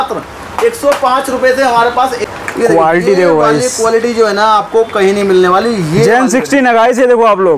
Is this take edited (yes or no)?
yes